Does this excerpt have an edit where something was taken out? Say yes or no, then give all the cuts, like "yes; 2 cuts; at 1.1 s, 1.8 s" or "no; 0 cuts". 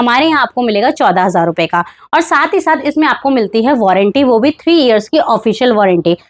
no; 0 cuts